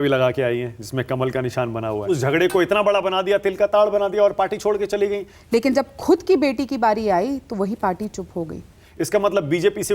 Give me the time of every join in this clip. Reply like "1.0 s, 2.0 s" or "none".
2.0 s, 5.3 s, 8.8 s